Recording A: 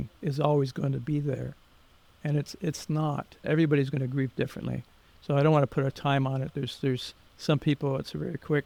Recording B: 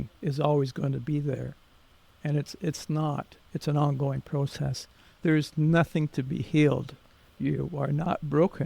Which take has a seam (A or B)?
B